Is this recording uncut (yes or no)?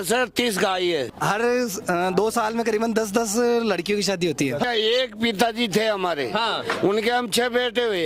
no